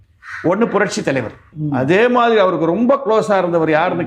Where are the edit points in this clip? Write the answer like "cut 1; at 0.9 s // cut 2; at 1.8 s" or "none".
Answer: cut 1; at 1.5 s